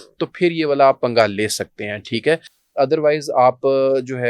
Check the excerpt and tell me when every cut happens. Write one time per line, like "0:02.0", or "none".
none